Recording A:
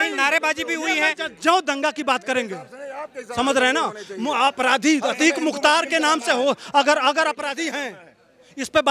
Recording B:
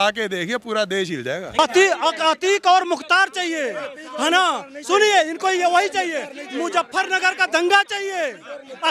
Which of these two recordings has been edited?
B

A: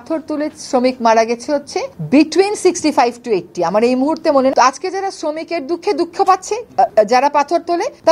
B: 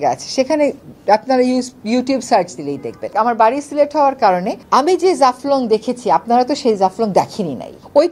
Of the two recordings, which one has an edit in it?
B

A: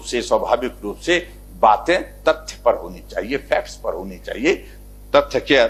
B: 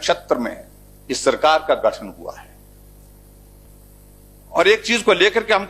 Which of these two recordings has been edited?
B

